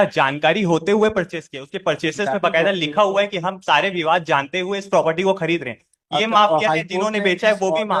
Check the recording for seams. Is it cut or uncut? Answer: uncut